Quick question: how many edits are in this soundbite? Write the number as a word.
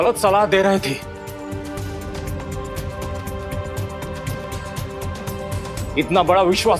zero